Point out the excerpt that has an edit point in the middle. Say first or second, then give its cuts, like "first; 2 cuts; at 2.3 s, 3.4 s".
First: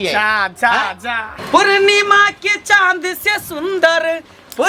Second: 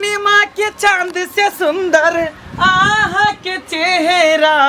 first; 1 cut; at 1.4 s